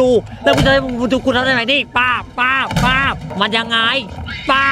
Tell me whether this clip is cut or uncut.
cut